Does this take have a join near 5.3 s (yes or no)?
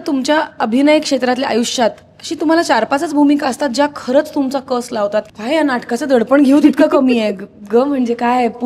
yes